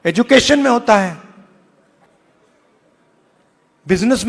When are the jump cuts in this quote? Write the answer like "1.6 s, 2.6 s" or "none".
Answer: 2.1 s